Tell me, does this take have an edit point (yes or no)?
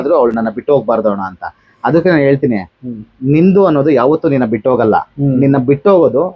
no